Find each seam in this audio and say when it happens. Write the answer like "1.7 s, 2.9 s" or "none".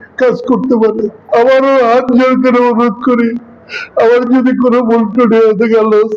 1.2 s